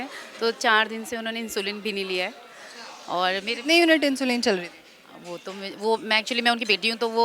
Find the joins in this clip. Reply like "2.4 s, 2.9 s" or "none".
none